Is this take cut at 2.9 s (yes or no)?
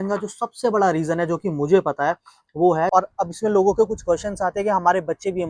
yes